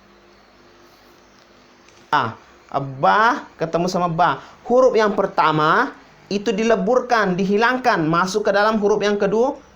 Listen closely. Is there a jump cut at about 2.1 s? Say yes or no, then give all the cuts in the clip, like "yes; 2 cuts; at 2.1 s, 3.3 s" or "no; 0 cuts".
yes; 1 cut; at 2.1 s